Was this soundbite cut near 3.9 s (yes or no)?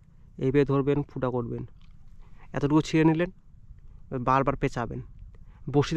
no